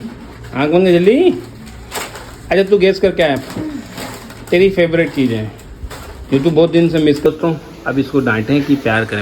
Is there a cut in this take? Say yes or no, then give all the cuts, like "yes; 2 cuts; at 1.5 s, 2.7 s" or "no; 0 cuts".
yes; 1 cut; at 7.2 s